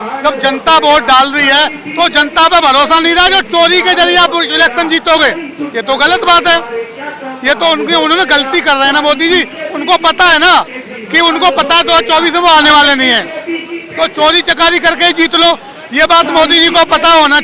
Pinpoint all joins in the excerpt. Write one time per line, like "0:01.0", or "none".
none